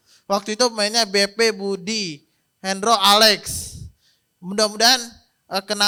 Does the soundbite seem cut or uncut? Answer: uncut